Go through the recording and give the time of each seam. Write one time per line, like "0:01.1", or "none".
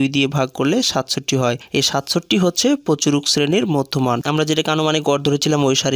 0:04.2